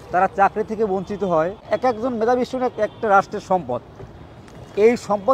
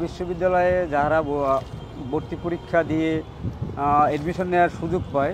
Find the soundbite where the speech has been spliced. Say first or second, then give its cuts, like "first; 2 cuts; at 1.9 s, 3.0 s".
first; 1 cut; at 1.7 s